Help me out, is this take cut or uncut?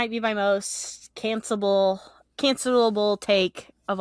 uncut